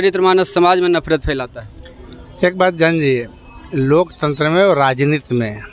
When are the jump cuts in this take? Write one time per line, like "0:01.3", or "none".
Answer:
0:04.6